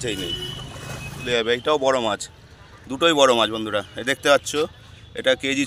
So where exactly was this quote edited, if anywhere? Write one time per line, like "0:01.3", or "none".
0:01.2